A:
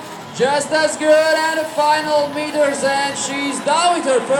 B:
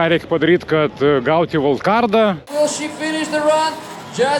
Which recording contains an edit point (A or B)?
B